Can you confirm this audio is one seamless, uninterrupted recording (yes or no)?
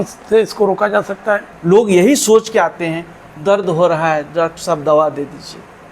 no